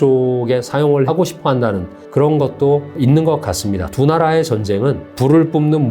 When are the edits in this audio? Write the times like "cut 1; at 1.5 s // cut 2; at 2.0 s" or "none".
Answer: cut 1; at 1.0 s // cut 2; at 1.9 s // cut 3; at 2.9 s // cut 4; at 5.1 s